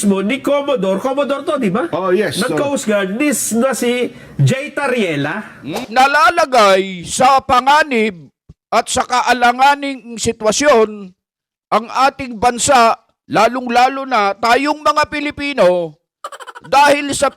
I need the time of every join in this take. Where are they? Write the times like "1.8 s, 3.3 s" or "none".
5.8 s